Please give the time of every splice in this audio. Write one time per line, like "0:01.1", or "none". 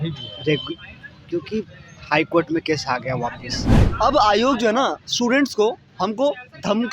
0:03.8

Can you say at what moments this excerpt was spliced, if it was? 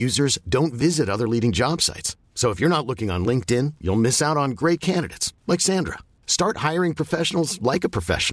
none

